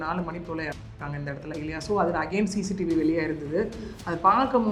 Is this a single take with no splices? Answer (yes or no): yes